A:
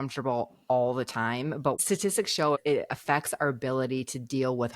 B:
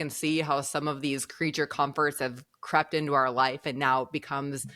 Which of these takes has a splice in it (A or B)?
A